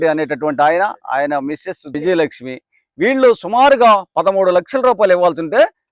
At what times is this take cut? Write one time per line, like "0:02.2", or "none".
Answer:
0:01.9